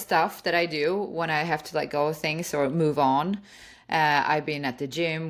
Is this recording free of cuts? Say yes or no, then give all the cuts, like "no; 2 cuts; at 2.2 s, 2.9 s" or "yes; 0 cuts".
yes; 0 cuts